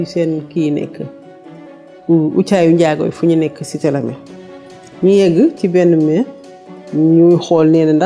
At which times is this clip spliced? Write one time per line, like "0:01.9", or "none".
none